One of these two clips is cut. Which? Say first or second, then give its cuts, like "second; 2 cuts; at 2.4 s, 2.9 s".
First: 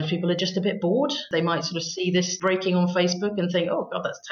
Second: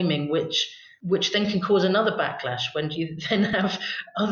first; 2 cuts; at 1.3 s, 2.3 s